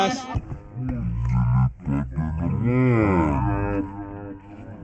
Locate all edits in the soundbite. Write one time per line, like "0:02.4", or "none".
none

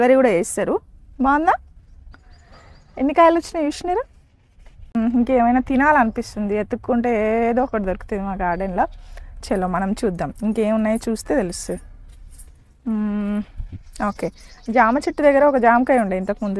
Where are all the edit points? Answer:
0:05.0

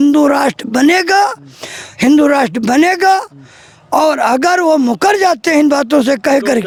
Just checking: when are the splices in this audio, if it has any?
none

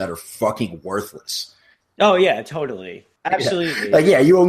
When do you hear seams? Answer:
0:03.1

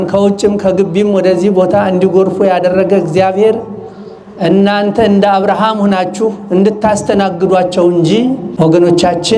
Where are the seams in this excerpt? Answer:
0:08.5

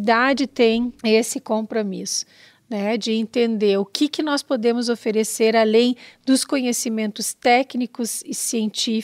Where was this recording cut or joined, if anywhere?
0:01.0

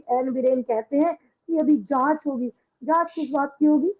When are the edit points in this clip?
none

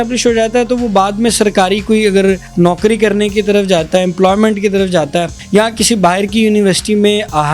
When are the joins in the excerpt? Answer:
0:02.5
0:05.4

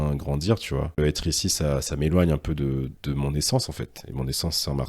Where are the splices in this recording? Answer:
0:01.0

